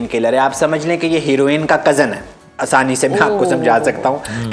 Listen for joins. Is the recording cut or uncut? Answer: uncut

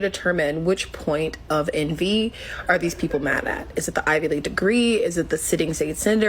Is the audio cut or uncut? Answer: cut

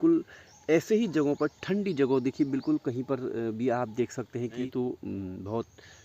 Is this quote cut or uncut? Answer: cut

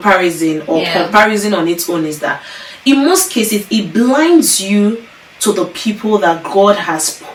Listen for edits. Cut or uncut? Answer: uncut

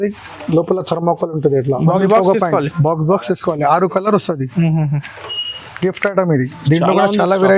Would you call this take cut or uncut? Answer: cut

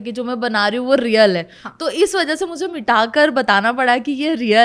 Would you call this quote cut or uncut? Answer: uncut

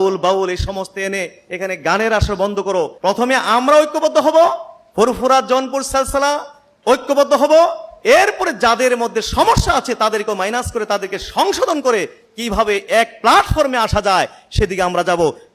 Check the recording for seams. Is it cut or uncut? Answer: cut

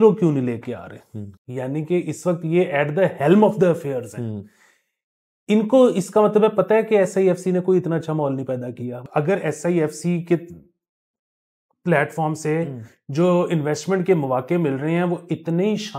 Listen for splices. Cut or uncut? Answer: cut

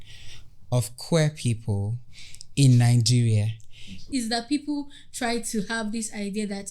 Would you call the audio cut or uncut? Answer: cut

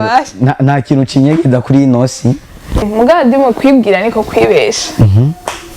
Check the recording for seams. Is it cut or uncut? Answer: cut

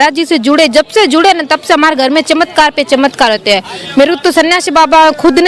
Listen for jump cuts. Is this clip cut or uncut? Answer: uncut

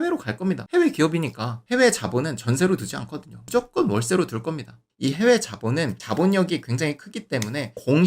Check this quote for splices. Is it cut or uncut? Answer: cut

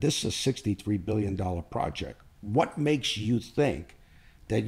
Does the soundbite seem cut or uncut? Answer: uncut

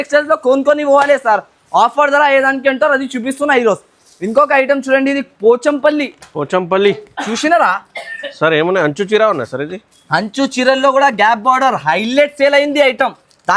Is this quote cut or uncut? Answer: uncut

